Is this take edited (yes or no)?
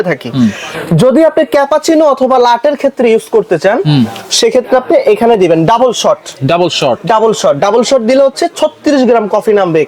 no